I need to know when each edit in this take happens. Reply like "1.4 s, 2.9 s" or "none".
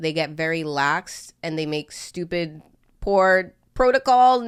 none